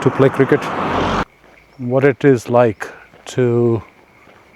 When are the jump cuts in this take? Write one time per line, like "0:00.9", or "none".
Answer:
0:01.2